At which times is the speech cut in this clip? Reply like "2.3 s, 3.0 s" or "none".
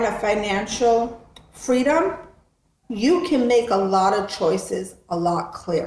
none